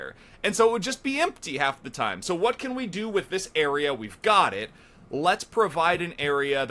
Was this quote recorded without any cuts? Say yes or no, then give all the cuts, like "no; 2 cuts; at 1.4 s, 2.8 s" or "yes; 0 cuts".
yes; 0 cuts